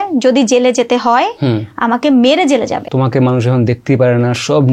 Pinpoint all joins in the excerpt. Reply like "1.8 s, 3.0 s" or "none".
2.9 s